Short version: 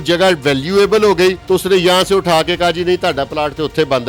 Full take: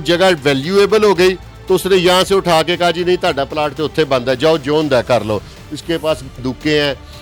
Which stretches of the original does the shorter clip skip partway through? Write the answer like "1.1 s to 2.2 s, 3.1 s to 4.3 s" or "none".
1.4 s to 1.6 s